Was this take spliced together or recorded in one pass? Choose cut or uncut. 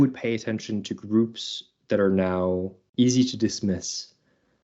cut